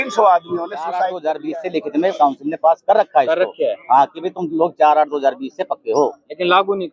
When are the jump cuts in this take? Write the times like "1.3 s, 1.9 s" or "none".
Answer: 1.1 s